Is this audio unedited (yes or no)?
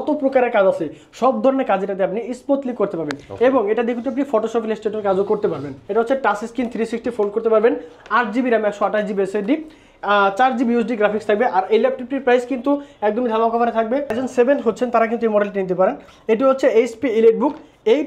no